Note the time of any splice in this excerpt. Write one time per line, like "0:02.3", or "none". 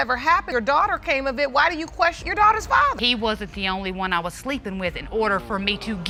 none